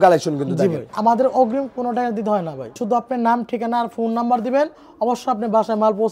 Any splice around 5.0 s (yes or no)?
no